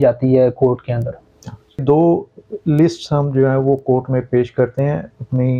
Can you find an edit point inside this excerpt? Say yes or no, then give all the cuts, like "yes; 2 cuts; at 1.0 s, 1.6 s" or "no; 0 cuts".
yes; 1 cut; at 1.8 s